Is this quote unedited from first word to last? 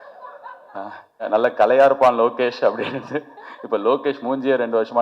no; 1 cut; at 1.3 s

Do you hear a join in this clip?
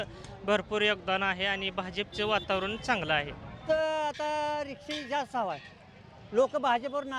yes; 1 cut; at 3.7 s

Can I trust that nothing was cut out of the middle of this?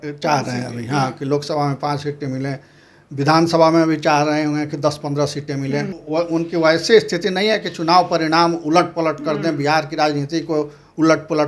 no; 1 cut; at 5.9 s

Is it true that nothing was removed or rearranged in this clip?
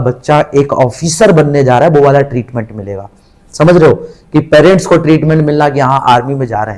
yes; 0 cuts

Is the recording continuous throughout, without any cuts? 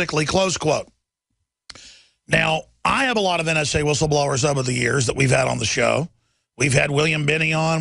no; 1 cut; at 5.4 s

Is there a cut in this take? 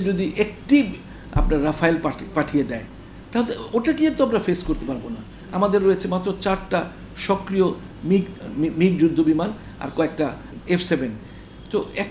yes; 2 cuts; at 8.4 s, 10.5 s

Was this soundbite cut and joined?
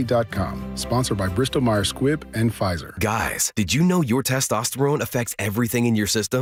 no; 0 cuts

